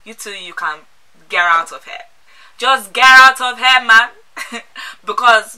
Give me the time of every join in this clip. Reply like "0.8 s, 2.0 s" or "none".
none